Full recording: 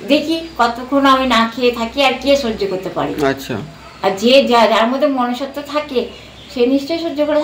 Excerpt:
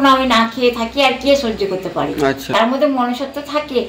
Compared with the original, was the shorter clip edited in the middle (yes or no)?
yes